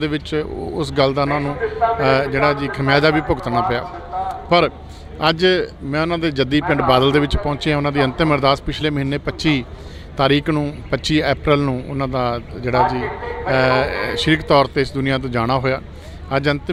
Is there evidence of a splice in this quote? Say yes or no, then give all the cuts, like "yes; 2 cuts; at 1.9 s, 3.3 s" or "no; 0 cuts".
no; 0 cuts